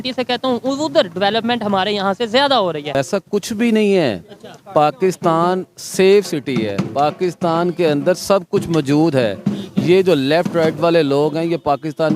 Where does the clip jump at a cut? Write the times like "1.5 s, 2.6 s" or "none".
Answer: 3.0 s